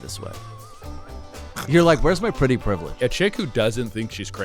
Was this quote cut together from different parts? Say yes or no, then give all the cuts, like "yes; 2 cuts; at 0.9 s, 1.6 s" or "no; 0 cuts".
yes; 1 cut; at 3.0 s